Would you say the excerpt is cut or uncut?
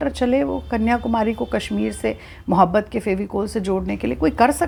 uncut